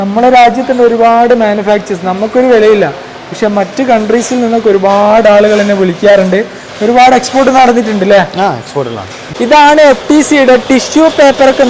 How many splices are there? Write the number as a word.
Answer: zero